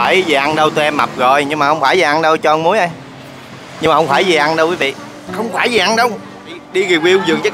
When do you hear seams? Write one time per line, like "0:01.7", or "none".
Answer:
0:06.6